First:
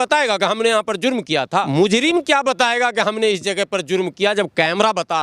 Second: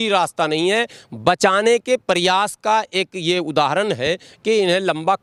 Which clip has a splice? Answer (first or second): first